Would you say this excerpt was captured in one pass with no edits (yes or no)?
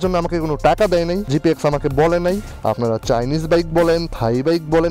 no